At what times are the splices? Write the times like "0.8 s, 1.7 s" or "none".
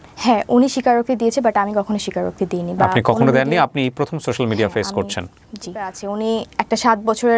6.0 s